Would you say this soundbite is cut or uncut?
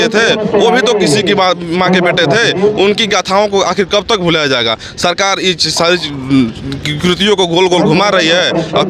uncut